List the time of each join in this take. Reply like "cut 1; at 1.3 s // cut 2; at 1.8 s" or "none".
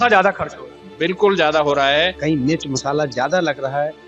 cut 1; at 2.2 s